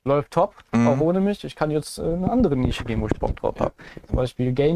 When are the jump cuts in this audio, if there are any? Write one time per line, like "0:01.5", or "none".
none